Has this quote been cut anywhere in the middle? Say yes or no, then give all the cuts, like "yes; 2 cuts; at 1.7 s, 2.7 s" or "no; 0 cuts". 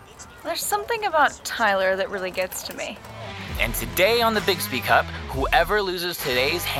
yes; 1 cut; at 3.3 s